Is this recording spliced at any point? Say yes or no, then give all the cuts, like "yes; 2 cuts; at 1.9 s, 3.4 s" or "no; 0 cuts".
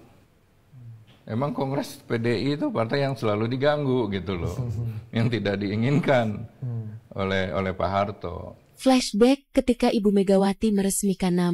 yes; 1 cut; at 8.6 s